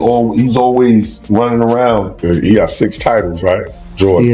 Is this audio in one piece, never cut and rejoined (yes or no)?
no